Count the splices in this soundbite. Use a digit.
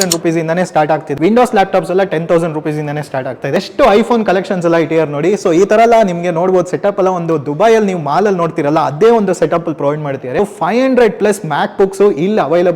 3